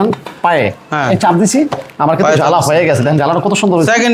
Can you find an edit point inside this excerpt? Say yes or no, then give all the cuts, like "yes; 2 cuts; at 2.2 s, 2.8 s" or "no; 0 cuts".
no; 0 cuts